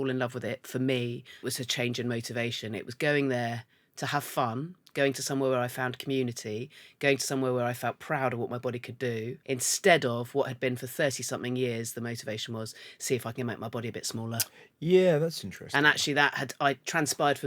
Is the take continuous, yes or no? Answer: no